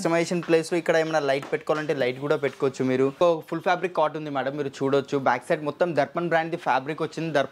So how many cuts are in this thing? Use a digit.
1